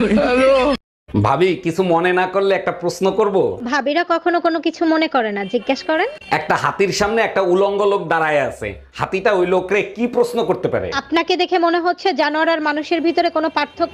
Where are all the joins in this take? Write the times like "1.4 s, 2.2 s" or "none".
0.9 s

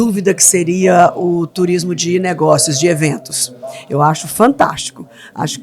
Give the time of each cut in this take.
none

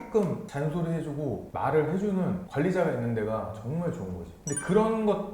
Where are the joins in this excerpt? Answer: 4.3 s

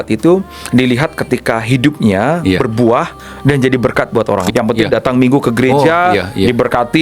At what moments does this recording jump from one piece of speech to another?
4.5 s

